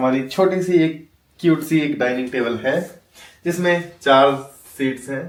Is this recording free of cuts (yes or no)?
yes